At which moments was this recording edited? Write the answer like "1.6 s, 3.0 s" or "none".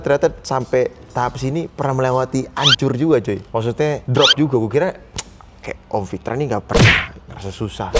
none